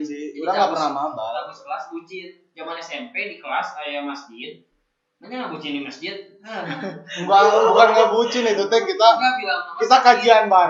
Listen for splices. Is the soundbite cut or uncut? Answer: uncut